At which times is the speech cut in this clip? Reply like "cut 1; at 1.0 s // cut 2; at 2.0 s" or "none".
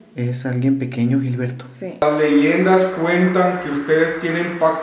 cut 1; at 2.0 s